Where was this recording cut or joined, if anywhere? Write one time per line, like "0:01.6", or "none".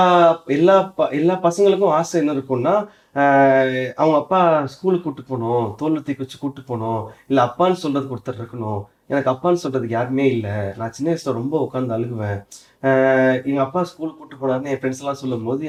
none